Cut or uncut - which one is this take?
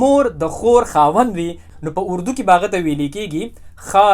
cut